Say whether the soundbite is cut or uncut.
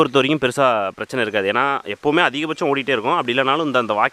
uncut